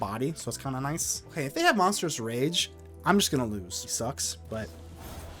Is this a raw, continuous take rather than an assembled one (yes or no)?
no